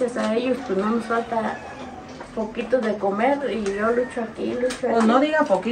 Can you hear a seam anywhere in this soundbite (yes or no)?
no